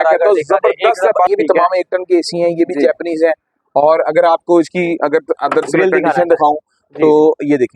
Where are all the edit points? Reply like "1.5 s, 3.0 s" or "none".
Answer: 1.3 s